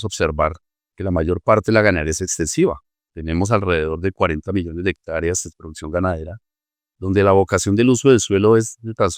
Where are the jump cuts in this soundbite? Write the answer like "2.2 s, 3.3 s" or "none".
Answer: none

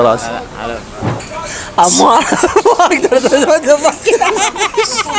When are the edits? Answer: 1.2 s

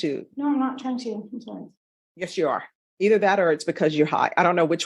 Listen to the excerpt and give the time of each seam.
none

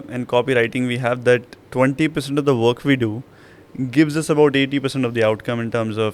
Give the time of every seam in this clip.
none

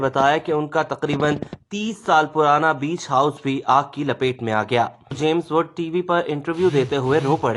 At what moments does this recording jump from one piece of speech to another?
5.1 s

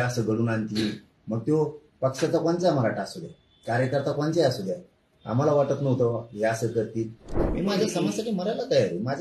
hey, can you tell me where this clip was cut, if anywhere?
7.3 s

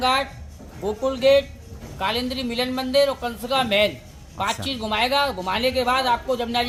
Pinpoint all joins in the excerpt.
none

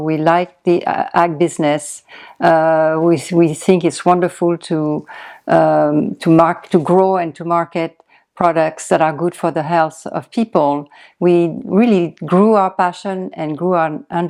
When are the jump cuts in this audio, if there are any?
none

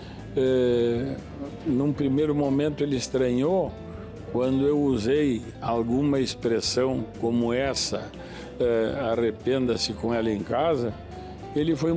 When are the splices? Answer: none

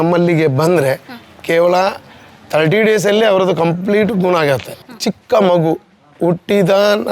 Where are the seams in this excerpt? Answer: 4.8 s

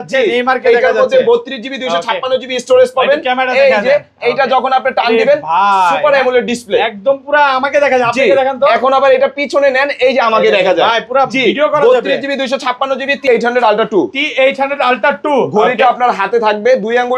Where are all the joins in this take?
13.3 s

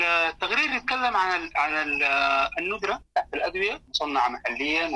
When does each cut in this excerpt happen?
3.0 s, 3.9 s

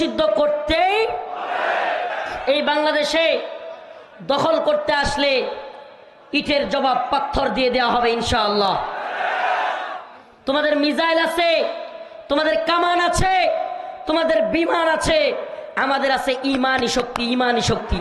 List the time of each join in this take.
2.1 s

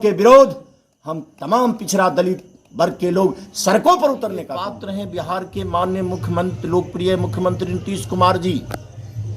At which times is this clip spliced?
4.8 s

